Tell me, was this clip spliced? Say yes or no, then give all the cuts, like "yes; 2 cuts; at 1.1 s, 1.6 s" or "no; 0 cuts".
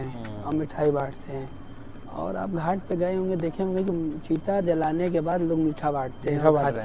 no; 0 cuts